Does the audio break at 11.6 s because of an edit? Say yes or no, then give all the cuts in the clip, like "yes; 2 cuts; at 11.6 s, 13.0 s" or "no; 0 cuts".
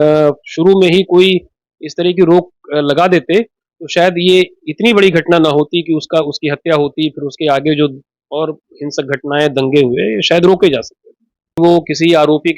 yes; 1 cut; at 11.6 s